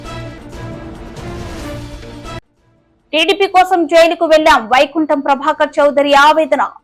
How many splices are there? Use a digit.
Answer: 1